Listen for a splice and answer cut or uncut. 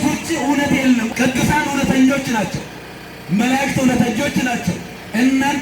cut